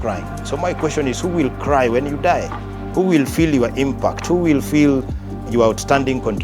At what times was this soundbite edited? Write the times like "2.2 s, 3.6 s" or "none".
5.5 s